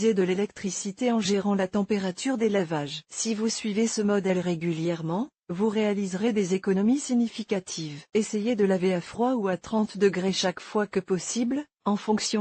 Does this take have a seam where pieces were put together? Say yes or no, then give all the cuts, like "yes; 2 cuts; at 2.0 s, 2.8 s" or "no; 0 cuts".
no; 0 cuts